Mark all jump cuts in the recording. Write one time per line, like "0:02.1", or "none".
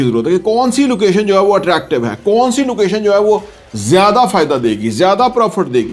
none